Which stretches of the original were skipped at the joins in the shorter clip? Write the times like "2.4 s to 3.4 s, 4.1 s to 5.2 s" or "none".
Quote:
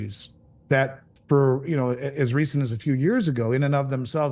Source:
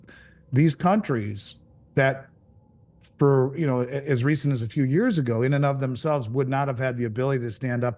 2.3 s to 3.0 s